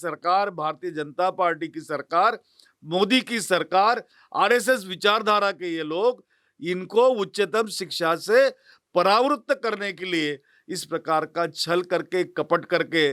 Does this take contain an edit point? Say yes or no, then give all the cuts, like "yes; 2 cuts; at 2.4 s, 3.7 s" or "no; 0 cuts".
no; 0 cuts